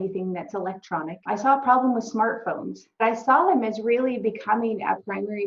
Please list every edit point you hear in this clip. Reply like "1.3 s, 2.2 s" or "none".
1.2 s, 3.0 s